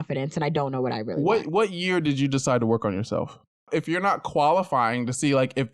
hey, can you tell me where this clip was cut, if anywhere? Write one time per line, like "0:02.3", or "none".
0:03.6